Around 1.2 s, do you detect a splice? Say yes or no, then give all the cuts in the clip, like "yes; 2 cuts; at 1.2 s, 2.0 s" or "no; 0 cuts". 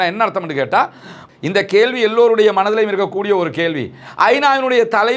yes; 1 cut; at 1.2 s